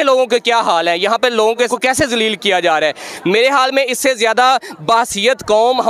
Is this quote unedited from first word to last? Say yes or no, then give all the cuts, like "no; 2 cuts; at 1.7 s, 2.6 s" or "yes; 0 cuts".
no; 1 cut; at 1.7 s